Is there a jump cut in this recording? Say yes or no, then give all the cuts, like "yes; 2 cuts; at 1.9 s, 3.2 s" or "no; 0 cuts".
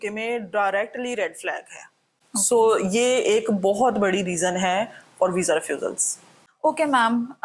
no; 0 cuts